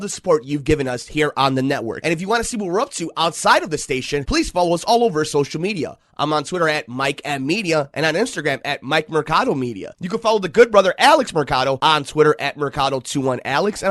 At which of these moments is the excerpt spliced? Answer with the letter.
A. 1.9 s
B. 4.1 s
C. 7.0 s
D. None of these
A